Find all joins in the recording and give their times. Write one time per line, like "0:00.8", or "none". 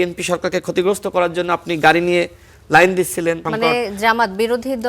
0:03.4